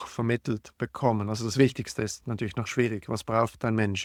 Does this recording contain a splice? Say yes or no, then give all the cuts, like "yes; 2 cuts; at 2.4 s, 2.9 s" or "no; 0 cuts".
no; 0 cuts